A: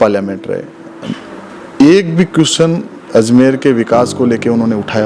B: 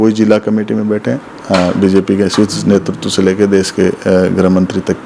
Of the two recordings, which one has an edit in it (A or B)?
B